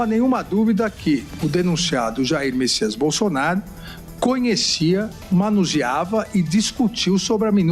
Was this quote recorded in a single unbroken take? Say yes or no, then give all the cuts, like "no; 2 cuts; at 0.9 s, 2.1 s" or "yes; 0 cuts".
yes; 0 cuts